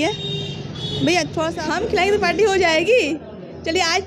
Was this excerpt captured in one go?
no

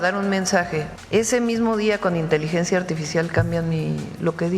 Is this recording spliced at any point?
yes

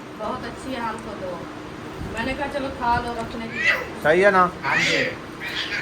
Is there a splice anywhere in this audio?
yes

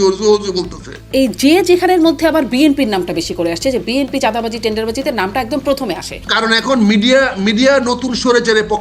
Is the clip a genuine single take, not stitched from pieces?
no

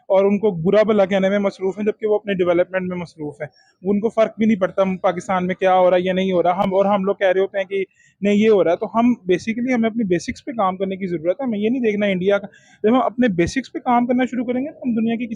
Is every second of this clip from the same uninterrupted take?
yes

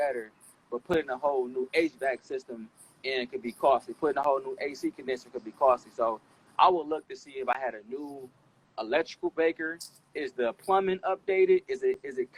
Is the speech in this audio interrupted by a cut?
no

